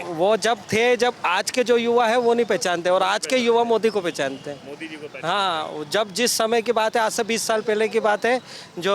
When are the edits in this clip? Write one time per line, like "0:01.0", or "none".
none